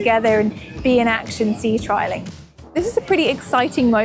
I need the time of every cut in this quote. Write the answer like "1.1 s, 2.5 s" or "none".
2.7 s